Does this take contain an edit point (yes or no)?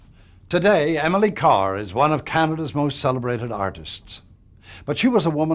yes